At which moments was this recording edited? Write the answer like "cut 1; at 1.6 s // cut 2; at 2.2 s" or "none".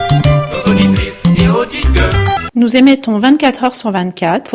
cut 1; at 2.4 s